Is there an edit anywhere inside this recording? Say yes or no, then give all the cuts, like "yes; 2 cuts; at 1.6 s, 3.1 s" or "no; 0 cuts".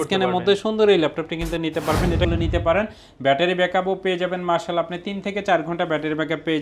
yes; 1 cut; at 2.3 s